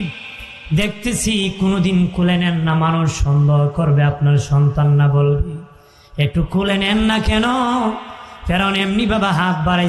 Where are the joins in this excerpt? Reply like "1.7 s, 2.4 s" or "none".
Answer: none